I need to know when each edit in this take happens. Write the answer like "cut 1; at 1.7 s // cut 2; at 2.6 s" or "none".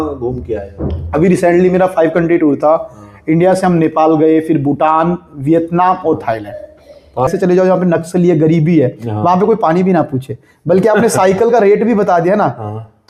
cut 1; at 7.3 s